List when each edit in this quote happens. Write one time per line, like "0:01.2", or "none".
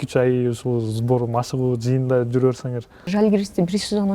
0:03.1